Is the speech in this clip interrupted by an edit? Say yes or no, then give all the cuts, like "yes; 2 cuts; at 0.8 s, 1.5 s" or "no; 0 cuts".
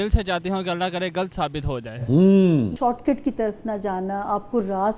yes; 1 cut; at 2.7 s